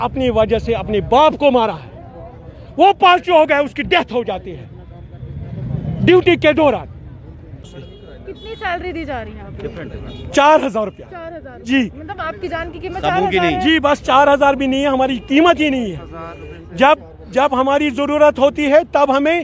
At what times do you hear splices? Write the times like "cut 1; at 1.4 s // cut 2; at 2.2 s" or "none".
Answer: cut 1; at 7.7 s